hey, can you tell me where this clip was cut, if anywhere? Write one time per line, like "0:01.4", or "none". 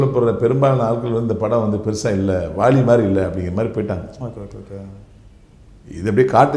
none